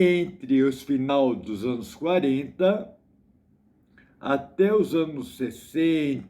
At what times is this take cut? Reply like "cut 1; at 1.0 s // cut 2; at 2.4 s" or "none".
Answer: cut 1; at 1.1 s